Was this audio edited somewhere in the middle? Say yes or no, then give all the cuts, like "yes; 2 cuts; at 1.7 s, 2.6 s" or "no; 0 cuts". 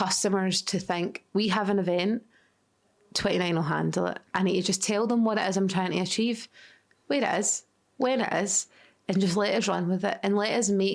no; 0 cuts